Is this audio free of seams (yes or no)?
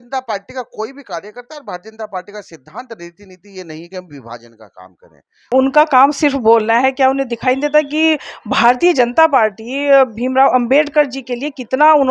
no